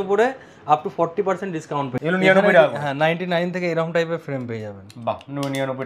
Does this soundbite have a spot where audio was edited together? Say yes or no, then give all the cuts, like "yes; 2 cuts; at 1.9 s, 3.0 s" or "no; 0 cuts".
yes; 1 cut; at 1.9 s